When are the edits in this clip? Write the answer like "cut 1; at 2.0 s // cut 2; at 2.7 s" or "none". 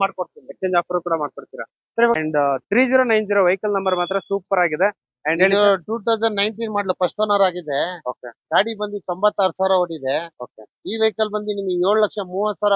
cut 1; at 2.1 s